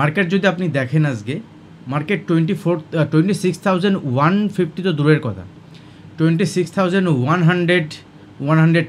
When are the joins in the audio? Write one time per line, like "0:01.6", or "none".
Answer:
none